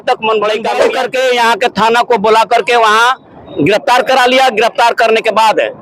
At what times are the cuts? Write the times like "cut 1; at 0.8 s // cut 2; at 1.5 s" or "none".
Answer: cut 1; at 0.9 s // cut 2; at 3.5 s